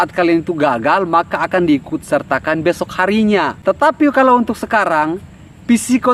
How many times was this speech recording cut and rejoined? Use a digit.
1